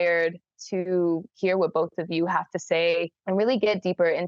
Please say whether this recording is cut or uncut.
cut